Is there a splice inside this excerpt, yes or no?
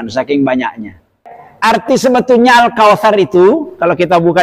yes